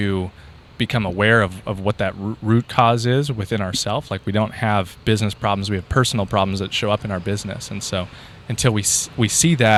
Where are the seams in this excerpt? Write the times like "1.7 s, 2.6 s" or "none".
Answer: none